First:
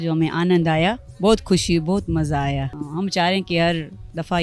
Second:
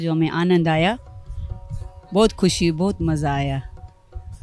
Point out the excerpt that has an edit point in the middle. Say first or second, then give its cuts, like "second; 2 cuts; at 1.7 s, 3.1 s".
first; 2 cuts; at 1.1 s, 2.8 s